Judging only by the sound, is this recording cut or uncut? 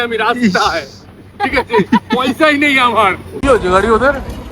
cut